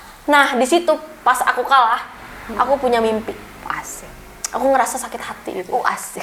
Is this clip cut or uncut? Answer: uncut